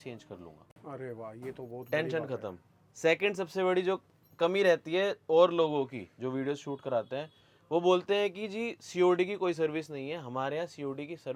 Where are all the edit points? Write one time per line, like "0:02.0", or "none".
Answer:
none

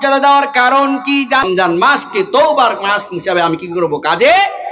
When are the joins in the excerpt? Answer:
0:01.4

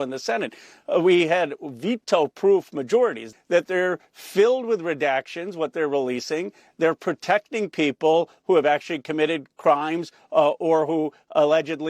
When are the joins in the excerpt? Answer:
0:03.3

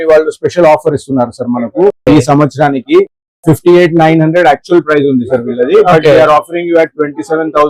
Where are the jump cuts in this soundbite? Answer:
none

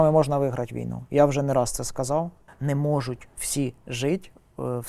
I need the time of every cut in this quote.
0:02.5

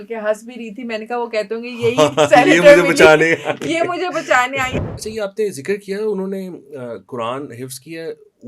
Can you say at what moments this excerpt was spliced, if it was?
0:04.7

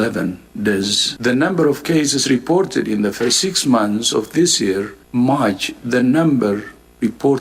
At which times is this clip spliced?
0:01.0

